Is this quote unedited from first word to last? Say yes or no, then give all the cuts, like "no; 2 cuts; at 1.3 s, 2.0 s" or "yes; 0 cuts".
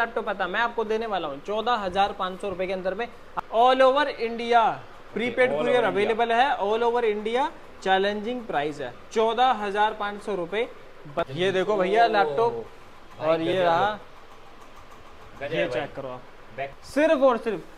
no; 3 cuts; at 3.2 s, 11.3 s, 16.7 s